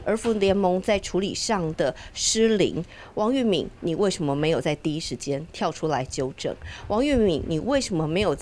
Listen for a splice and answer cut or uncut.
uncut